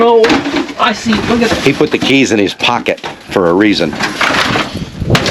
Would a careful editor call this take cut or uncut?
uncut